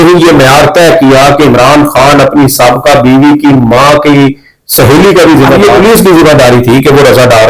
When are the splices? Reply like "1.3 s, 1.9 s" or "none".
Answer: 5.6 s